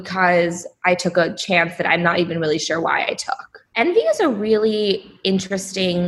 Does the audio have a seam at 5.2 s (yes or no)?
no